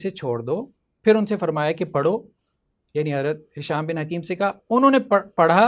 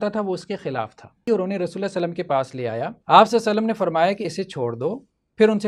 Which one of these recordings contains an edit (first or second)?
second